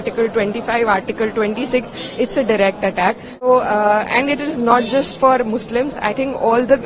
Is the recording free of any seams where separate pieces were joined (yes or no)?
no